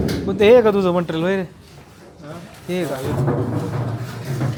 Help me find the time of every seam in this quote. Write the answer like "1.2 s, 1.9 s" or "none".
none